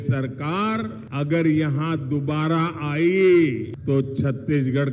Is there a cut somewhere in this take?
yes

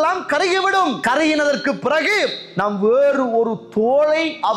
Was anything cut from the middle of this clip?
yes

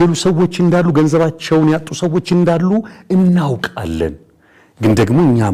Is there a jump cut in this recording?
no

